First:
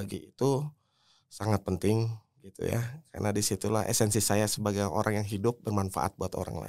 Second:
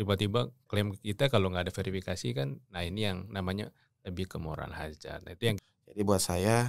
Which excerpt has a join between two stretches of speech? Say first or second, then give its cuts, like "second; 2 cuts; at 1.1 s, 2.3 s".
second; 1 cut; at 5.6 s